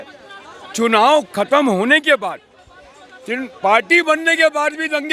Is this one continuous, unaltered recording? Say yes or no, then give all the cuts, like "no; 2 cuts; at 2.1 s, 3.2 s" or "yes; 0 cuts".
yes; 0 cuts